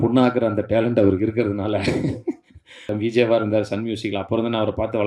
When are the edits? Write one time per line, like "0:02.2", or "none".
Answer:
0:02.9